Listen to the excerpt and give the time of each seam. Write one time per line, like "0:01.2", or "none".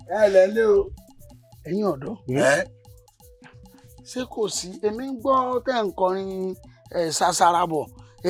none